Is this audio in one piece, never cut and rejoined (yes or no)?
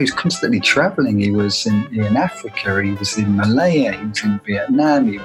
yes